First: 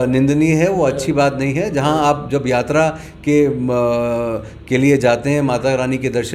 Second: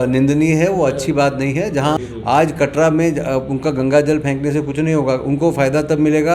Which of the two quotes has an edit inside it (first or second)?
second